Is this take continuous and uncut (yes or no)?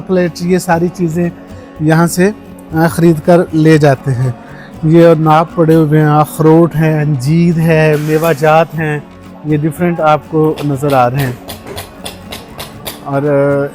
yes